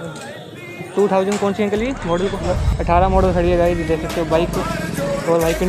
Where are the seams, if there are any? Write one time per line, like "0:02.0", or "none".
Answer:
0:02.5